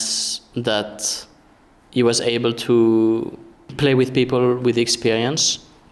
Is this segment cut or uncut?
cut